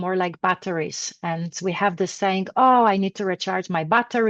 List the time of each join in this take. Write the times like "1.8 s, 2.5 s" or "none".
none